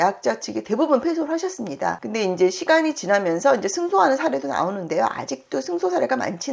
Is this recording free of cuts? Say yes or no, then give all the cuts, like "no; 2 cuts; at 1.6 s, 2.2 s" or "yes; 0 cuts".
yes; 0 cuts